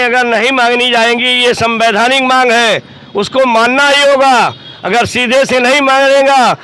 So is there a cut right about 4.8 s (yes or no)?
no